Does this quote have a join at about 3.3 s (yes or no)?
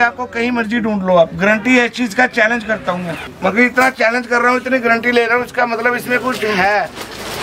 yes